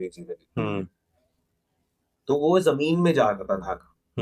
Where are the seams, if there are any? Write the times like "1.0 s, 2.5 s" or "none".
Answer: none

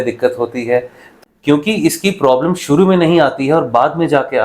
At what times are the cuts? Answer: 1.1 s

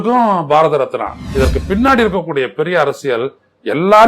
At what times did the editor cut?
1.2 s

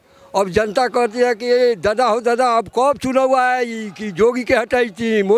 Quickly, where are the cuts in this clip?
none

